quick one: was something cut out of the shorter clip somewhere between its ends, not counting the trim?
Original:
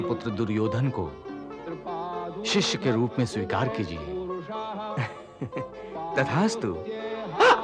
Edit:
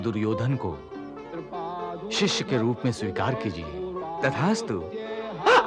yes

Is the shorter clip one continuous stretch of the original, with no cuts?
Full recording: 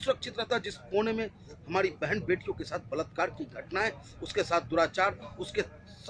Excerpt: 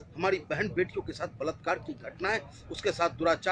yes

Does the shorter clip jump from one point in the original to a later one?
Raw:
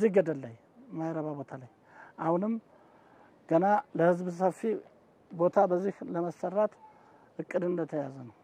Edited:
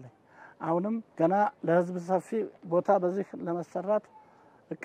yes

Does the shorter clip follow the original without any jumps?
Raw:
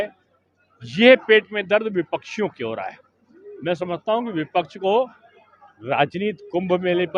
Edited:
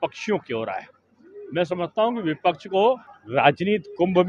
no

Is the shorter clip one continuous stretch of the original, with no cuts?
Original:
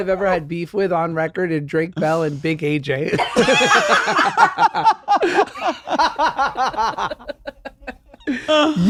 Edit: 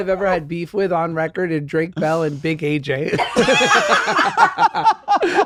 yes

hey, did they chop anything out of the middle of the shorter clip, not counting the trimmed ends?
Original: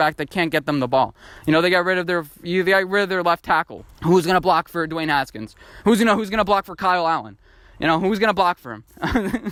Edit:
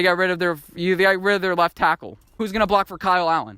yes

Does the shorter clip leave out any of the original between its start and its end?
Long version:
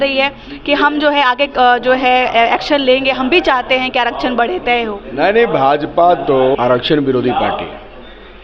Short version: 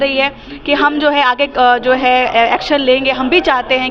no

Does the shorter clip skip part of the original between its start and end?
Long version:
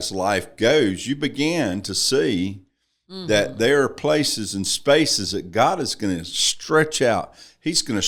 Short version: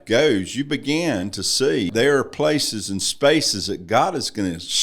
yes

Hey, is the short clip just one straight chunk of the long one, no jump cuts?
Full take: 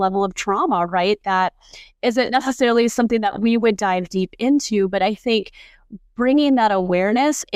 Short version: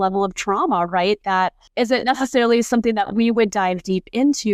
no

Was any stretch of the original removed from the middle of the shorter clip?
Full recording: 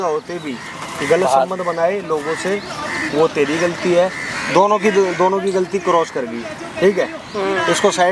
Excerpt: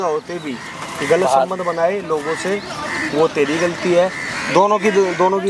no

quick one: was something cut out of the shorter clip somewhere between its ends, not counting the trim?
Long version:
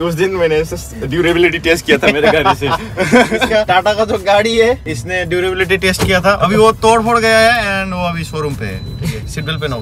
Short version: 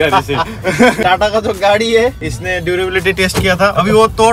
yes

